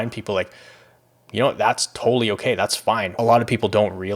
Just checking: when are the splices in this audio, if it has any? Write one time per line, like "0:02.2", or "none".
0:03.1